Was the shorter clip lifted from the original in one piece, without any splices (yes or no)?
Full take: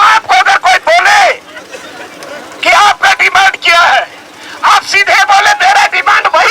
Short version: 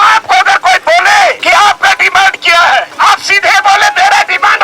no